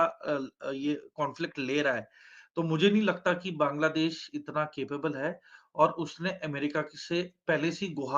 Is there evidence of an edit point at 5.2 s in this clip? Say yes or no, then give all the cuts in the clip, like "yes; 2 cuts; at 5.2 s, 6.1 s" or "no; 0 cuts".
no; 0 cuts